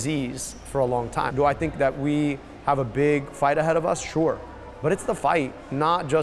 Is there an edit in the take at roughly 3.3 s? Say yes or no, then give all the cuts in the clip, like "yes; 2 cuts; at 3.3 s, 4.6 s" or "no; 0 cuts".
no; 1 cut; at 1.3 s